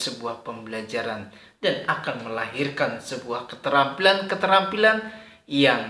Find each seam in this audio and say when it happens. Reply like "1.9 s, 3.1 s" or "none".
none